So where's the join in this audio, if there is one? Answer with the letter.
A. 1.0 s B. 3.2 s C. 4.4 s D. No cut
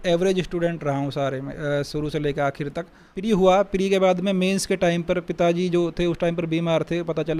B